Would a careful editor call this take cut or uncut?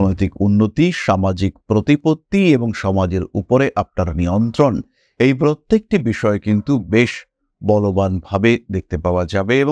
uncut